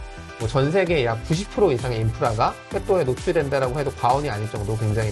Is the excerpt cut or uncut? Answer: uncut